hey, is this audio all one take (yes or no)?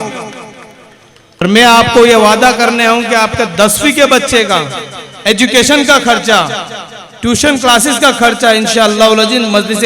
no